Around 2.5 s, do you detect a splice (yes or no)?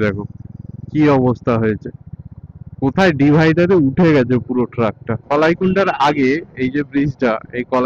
no